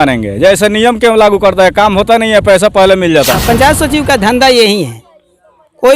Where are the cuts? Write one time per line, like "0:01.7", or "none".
0:03.4